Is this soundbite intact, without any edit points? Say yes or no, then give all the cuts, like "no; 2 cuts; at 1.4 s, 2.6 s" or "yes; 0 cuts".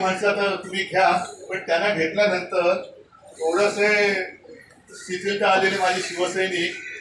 yes; 0 cuts